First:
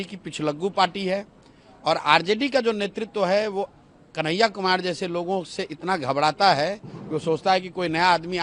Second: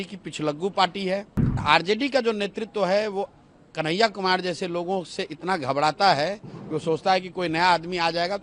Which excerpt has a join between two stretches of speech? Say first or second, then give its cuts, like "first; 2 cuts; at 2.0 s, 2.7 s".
second; 1 cut; at 1.6 s